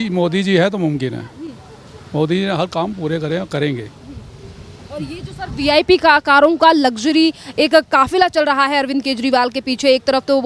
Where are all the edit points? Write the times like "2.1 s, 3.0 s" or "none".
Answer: none